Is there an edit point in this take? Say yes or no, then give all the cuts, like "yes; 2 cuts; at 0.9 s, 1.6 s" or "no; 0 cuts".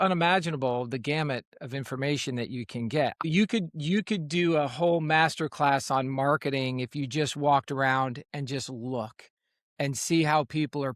yes; 1 cut; at 3.2 s